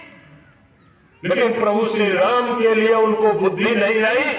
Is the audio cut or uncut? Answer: uncut